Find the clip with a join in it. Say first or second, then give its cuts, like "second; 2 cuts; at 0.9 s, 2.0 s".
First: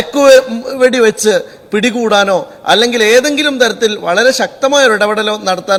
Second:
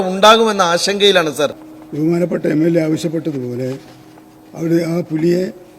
second; 1 cut; at 1.6 s